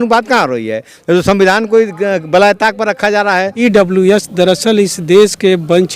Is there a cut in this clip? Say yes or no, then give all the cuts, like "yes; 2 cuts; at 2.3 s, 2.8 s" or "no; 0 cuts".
yes; 1 cut; at 3.5 s